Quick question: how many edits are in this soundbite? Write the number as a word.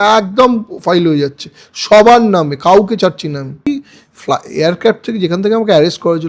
one